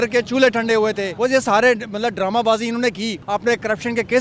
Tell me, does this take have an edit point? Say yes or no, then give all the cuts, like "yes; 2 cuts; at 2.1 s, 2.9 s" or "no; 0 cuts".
yes; 2 cuts; at 1.1 s, 3.2 s